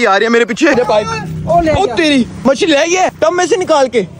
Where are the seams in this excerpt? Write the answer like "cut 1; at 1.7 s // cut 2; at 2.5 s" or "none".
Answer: cut 1; at 0.7 s // cut 2; at 2.3 s // cut 3; at 3.1 s